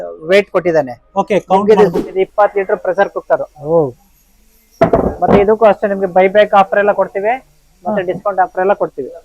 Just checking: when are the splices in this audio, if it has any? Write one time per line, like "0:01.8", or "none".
0:02.1